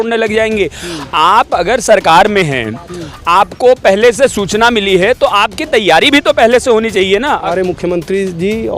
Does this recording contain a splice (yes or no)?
yes